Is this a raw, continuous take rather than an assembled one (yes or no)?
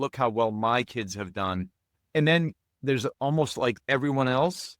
no